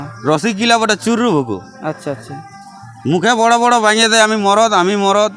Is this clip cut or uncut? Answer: uncut